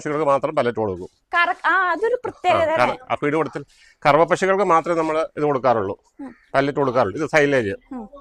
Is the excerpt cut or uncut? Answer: uncut